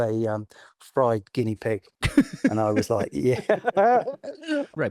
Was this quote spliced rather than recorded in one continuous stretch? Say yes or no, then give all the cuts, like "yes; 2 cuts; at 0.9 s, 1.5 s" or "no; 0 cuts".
no; 0 cuts